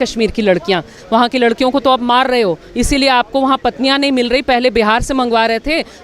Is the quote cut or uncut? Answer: cut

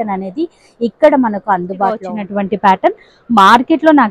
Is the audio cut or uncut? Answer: cut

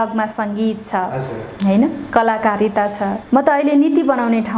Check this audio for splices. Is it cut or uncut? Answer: cut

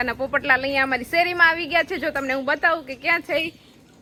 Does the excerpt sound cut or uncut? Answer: uncut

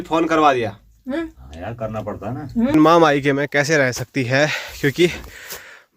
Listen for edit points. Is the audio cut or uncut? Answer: cut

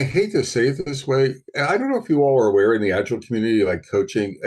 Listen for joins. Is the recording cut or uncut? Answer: uncut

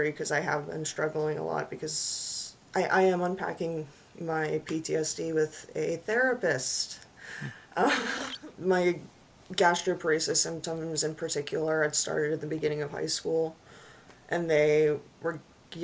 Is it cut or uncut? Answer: cut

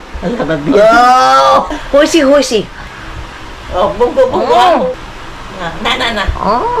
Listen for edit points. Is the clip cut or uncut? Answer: cut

